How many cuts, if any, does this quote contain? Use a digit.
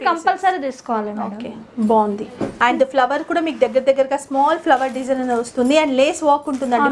1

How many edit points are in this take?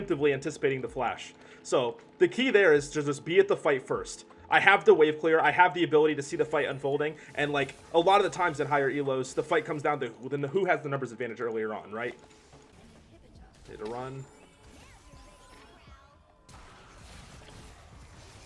1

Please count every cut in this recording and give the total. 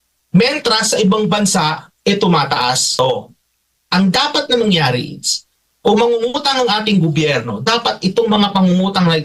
1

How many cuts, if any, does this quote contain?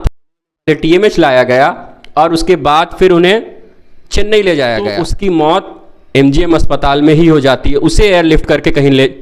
1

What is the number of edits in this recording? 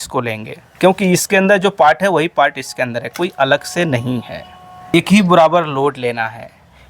1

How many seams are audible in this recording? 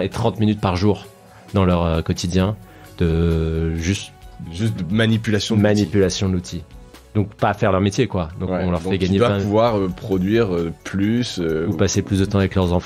0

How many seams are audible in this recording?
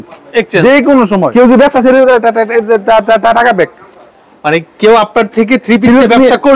1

